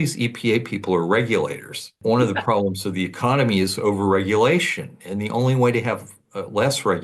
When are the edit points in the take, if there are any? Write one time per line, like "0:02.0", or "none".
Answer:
0:01.9